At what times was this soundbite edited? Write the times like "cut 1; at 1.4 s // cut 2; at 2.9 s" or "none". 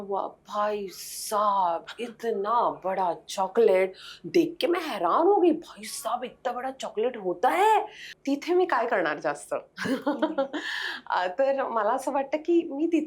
cut 1; at 8.1 s